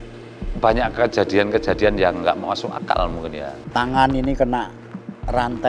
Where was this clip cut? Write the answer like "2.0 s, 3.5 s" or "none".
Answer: 3.5 s